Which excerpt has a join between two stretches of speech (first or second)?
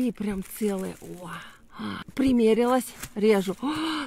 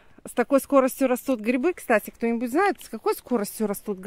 first